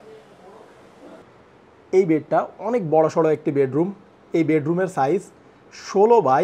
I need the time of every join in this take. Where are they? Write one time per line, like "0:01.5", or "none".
0:01.2